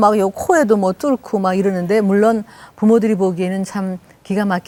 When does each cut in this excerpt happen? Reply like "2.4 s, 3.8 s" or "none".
none

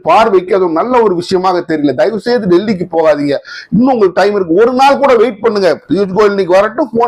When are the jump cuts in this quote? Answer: none

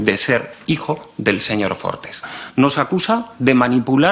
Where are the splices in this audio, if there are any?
2.2 s

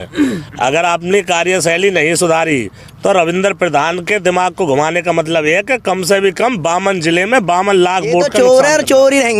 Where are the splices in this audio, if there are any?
8.3 s

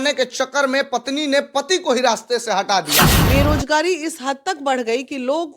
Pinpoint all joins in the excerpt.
3.2 s

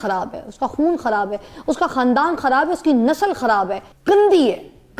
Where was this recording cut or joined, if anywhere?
3.9 s

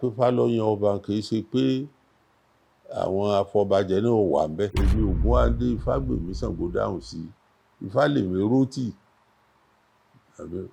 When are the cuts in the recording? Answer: 4.8 s

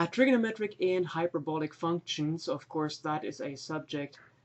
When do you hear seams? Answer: 1.2 s

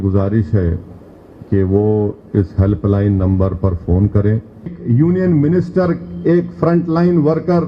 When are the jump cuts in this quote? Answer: 4.8 s

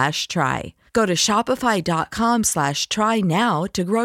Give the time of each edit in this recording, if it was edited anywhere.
none

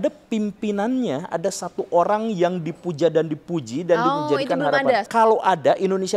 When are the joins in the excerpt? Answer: 5.1 s

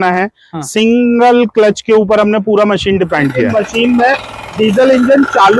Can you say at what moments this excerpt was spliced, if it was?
3.5 s

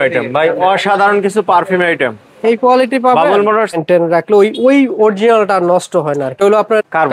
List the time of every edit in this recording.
3.6 s

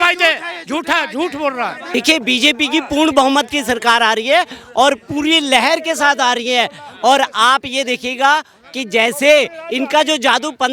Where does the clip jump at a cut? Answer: 1.8 s

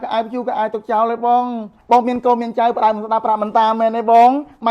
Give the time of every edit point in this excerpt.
1.7 s

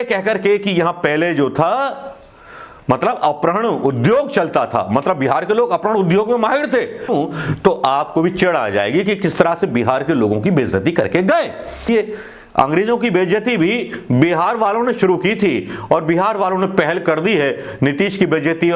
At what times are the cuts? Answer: 7.1 s, 11.9 s

